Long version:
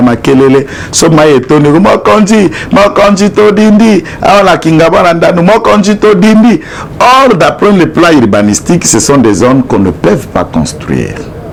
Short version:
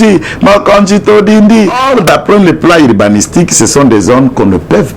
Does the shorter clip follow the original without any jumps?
no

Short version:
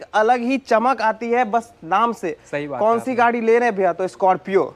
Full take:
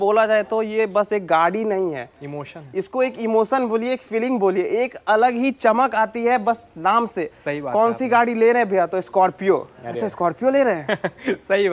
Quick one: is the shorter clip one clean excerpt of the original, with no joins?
yes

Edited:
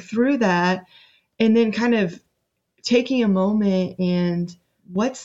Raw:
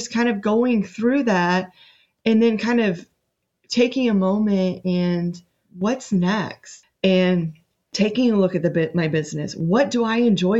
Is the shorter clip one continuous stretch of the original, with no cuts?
yes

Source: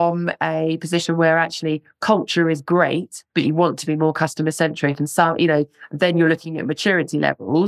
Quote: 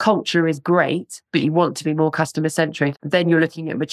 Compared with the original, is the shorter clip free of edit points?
no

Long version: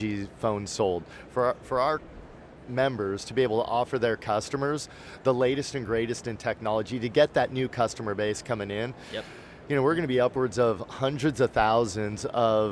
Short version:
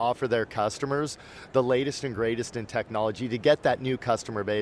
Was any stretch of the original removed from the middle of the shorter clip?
no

